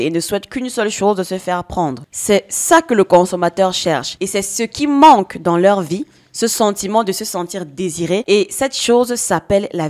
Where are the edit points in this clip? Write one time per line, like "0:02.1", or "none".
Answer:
none